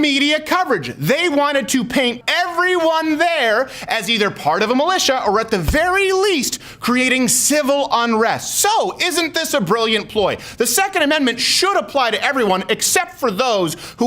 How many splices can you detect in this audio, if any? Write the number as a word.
one